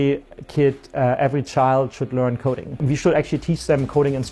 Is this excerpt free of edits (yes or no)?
no